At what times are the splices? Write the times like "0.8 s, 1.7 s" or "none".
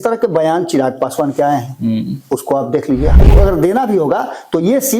3.1 s